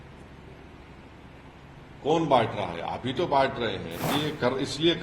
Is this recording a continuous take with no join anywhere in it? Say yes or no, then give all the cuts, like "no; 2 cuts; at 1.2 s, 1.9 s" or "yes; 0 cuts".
no; 1 cut; at 4.1 s